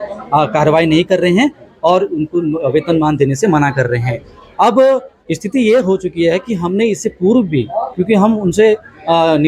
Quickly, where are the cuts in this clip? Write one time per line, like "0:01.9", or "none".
none